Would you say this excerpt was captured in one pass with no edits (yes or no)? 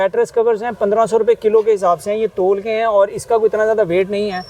yes